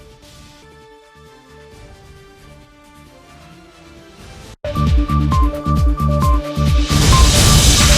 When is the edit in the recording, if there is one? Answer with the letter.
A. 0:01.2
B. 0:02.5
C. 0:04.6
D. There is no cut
C